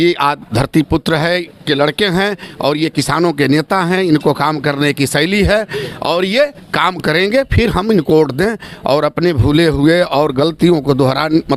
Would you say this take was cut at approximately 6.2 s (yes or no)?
no